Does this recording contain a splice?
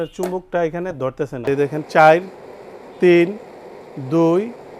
yes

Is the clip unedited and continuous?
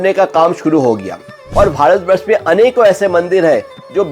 no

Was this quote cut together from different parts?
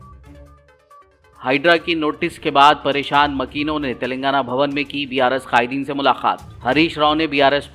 no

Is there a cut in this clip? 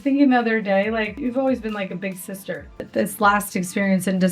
yes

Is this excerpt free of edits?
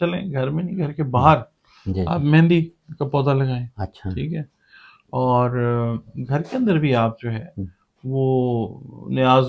yes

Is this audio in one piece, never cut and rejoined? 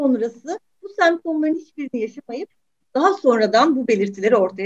yes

